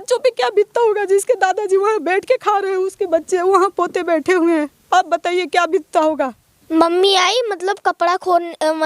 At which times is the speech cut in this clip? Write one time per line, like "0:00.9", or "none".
0:06.6